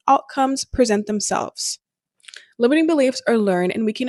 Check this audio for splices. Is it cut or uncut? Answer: uncut